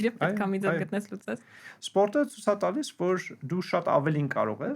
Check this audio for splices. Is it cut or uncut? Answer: cut